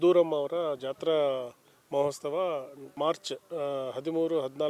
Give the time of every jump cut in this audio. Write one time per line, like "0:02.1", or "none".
none